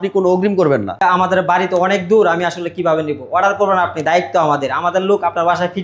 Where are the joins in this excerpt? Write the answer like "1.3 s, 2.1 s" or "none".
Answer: 1.0 s